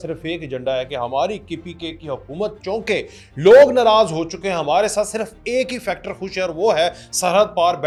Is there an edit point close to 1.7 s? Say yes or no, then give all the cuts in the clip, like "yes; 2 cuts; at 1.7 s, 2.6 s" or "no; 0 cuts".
no; 0 cuts